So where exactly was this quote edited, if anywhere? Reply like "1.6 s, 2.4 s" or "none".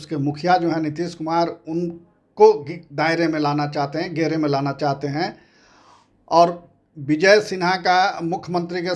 none